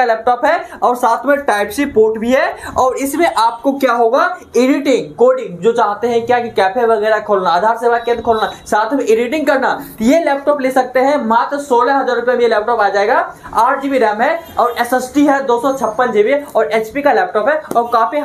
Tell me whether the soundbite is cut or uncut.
uncut